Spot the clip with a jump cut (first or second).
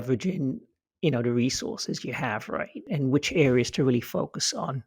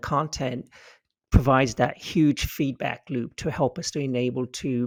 first